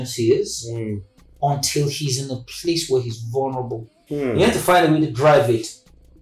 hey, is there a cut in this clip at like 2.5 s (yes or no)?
no